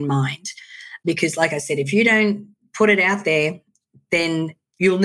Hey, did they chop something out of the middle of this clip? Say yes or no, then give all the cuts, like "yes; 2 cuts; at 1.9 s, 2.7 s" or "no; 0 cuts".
yes; 2 cuts; at 1.0 s, 4.2 s